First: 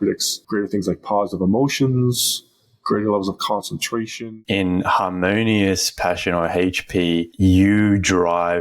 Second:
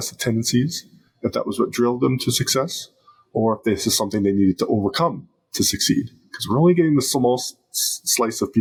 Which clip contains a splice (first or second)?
first